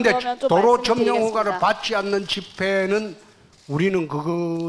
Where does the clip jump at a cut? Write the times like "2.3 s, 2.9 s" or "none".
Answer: none